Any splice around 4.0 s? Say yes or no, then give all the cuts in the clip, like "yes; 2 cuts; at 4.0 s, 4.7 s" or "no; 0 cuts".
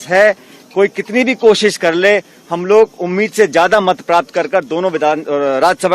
no; 0 cuts